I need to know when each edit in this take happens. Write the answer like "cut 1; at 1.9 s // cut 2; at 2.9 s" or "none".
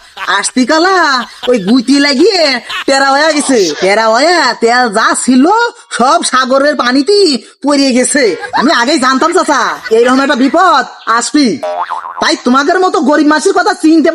cut 1; at 8.4 s